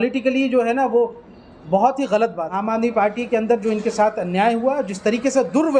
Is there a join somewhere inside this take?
yes; 1 cut; at 2.5 s

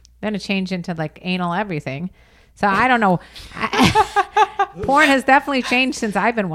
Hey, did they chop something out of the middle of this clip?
no; 0 cuts

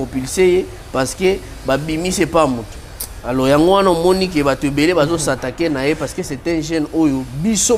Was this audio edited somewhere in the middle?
no; 0 cuts

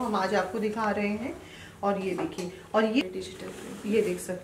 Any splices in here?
yes; 1 cut; at 3.0 s

